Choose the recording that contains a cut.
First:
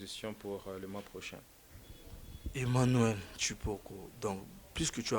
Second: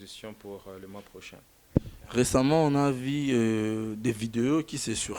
second; 1 cut; at 1.6 s

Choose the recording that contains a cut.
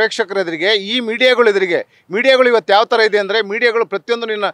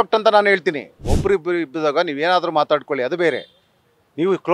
second; 1 cut; at 1.0 s

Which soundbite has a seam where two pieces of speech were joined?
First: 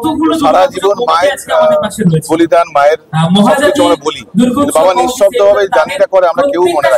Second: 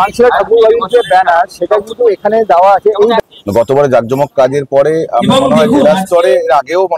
second; 1 cut; at 3.2 s

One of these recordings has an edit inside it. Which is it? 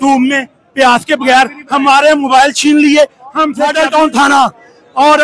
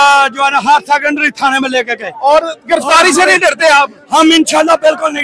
first; 1 cut; at 3.6 s

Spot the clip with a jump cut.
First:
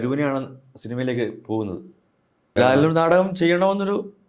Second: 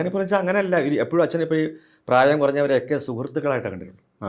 first; 1 cut; at 2.5 s

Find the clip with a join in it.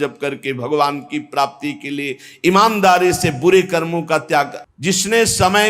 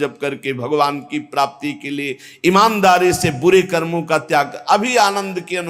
first; 1 cut; at 4.6 s

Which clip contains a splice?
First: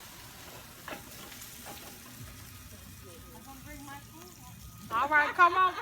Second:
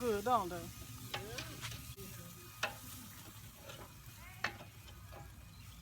second; 1 cut; at 2.0 s

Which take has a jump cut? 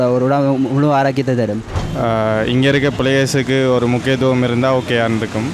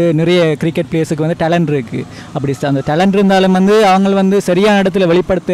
first; 1 cut; at 1.7 s

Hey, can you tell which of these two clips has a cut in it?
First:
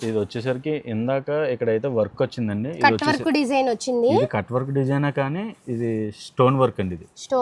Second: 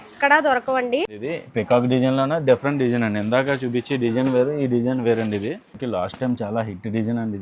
second; 2 cuts; at 1.0 s, 5.8 s

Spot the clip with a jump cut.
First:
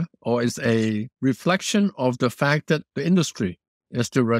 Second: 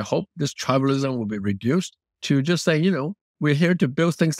first; 2 cuts; at 1.1 s, 2.9 s

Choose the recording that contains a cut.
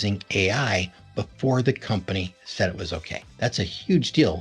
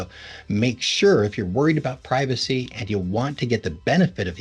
first; 1 cut; at 3.2 s

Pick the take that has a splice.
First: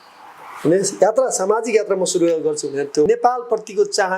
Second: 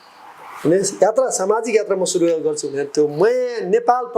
first; 1 cut; at 3.1 s

